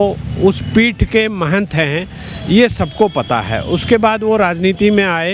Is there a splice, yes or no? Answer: no